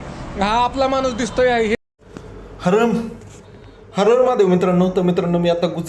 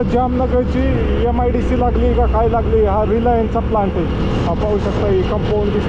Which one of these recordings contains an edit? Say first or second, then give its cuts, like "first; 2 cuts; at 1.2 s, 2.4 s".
first; 1 cut; at 1.8 s